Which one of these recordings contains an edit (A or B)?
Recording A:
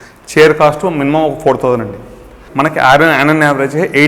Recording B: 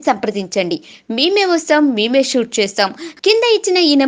A